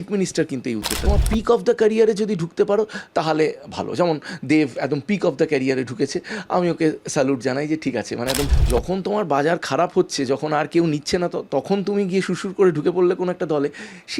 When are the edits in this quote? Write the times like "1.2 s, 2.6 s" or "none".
1.1 s, 8.5 s